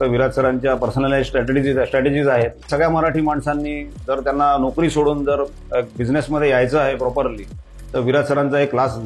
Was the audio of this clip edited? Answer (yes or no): yes